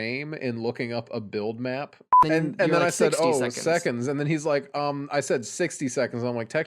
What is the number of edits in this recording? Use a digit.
1